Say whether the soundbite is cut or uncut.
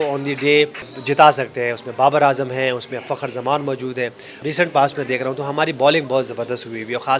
cut